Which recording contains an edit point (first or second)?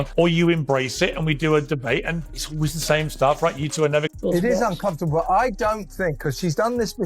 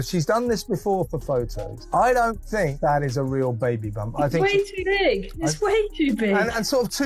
first